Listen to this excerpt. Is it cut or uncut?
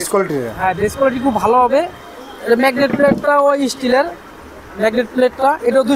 uncut